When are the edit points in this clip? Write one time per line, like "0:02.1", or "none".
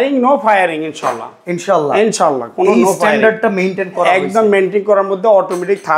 none